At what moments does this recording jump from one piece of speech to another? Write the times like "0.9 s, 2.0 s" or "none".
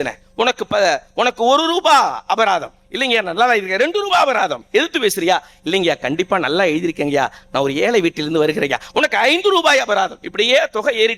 none